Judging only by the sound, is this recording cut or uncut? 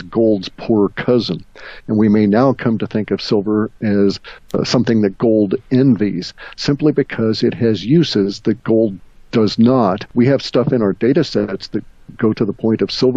cut